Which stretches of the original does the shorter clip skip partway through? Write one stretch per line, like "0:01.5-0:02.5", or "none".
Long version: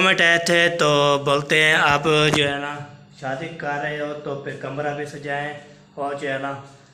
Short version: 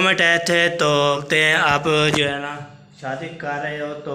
0:01.2-0:01.4